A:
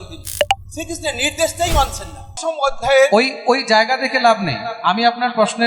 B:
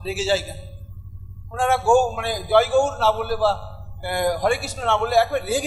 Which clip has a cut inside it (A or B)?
A